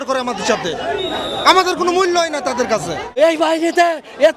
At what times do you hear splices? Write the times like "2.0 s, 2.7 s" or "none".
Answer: 3.2 s